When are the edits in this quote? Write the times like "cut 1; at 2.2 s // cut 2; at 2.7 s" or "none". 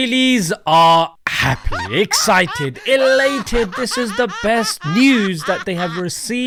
none